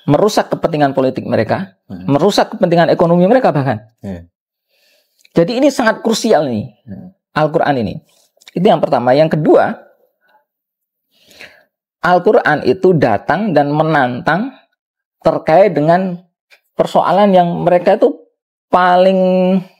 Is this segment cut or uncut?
uncut